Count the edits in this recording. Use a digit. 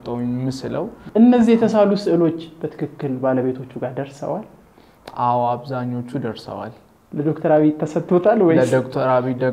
1